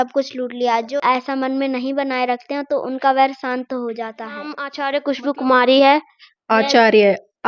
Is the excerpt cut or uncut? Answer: cut